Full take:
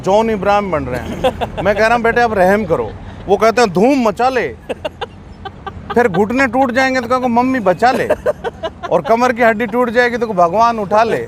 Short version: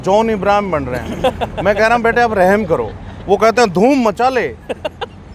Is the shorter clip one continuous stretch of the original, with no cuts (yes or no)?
yes